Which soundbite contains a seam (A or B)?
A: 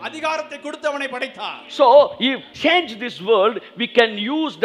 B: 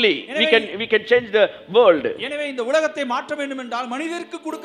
A